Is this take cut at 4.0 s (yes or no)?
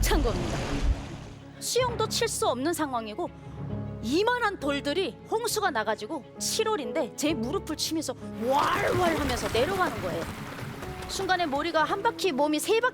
no